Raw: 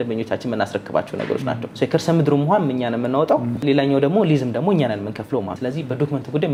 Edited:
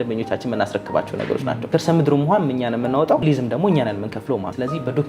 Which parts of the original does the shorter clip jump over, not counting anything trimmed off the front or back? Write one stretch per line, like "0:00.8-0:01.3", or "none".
0:01.7-0:01.9
0:03.4-0:04.3

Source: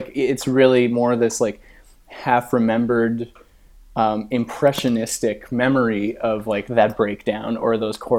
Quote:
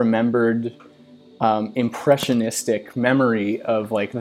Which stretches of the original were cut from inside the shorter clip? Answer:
none

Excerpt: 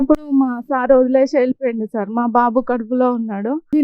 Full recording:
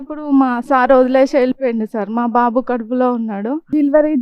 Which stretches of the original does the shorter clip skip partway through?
none

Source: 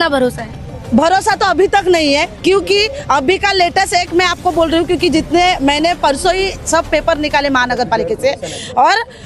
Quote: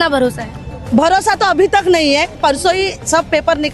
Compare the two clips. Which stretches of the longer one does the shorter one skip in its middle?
0:02.4-0:06.0

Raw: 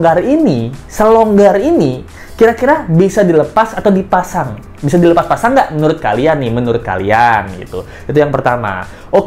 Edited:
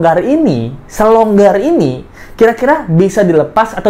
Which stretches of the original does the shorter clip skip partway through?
none

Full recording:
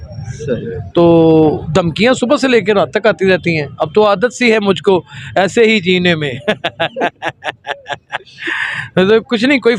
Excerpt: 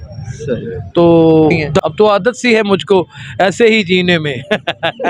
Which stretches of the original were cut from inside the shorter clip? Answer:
0:01.7-0:03.7

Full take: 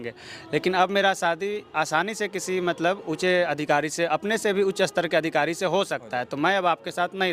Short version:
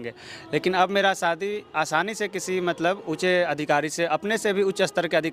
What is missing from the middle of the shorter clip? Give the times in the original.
none

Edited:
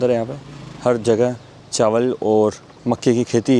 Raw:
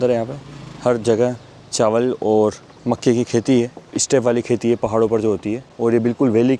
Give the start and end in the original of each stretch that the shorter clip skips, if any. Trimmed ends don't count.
none

